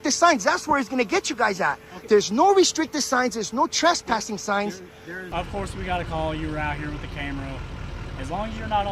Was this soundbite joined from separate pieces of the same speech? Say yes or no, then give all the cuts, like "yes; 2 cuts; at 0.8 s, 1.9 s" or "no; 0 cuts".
yes; 1 cut; at 5.3 s